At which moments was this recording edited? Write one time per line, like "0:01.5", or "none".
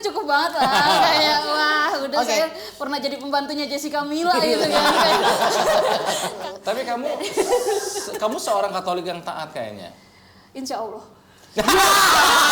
0:06.3